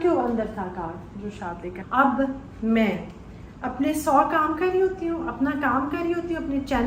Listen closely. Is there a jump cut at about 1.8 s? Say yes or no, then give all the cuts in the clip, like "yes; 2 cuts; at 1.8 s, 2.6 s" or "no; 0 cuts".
yes; 1 cut; at 1.8 s